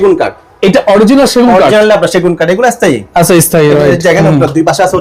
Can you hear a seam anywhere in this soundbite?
no; 0 cuts

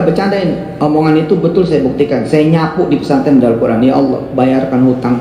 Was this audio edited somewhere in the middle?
no; 0 cuts

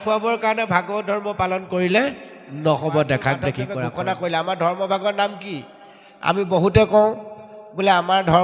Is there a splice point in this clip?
yes; 1 cut; at 3.7 s

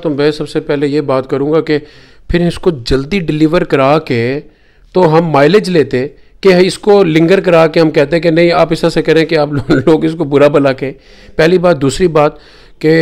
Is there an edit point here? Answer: no; 0 cuts

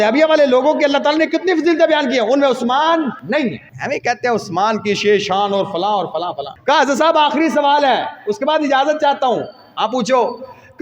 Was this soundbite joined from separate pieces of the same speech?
yes; 2 cuts; at 3.3 s, 6.5 s

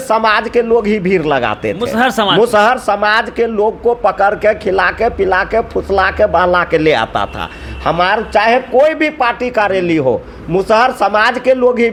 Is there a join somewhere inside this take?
no; 0 cuts

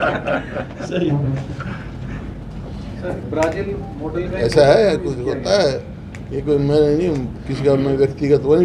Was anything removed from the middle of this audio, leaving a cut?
no; 0 cuts

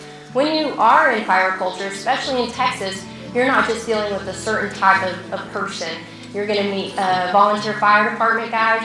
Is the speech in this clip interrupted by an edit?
no; 0 cuts

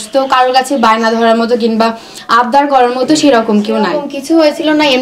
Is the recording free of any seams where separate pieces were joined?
no; 1 cut; at 4.1 s

